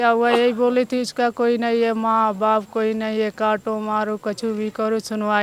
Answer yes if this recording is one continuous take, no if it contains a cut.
yes